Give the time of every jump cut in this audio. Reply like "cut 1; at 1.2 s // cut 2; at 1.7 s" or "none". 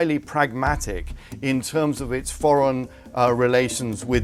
none